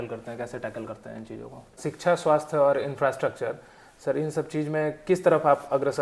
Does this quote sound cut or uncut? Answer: cut